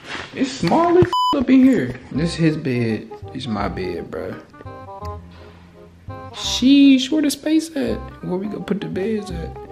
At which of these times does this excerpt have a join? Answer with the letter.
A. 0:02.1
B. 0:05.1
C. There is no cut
A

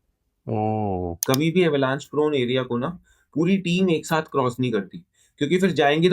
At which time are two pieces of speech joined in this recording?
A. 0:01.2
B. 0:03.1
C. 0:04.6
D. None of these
A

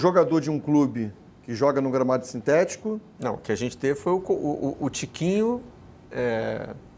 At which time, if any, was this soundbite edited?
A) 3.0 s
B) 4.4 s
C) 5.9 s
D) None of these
D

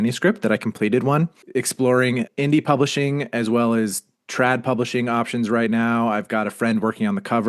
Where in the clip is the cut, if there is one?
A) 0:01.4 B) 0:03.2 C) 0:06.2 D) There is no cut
A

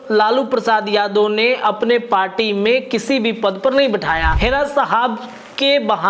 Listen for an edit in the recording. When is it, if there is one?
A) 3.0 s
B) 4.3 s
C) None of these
B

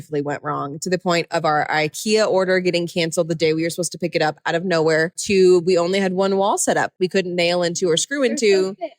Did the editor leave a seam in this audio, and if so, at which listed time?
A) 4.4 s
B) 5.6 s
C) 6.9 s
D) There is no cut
C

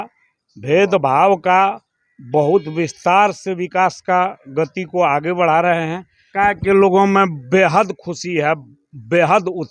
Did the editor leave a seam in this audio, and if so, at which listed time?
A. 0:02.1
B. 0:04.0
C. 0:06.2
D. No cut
C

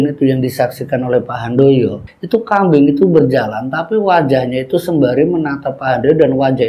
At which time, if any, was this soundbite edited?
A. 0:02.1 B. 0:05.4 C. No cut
A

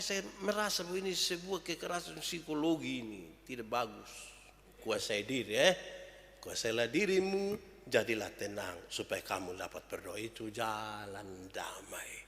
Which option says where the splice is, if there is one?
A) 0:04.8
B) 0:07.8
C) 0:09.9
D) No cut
A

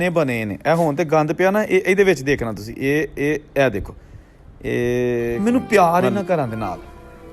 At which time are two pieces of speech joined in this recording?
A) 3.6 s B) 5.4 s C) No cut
B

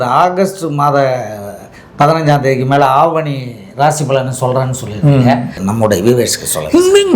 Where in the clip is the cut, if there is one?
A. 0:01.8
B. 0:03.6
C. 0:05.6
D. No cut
C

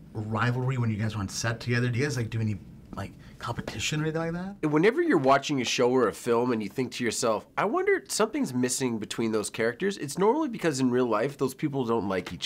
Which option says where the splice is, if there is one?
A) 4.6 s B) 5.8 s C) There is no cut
A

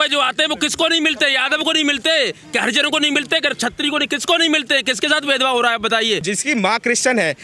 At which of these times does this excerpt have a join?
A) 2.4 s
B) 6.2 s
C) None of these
B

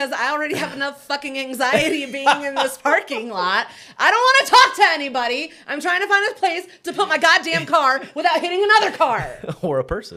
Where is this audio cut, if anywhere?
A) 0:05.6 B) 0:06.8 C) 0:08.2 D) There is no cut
D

